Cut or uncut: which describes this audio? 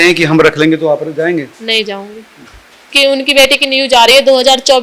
cut